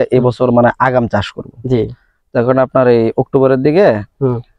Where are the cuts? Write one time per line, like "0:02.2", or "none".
none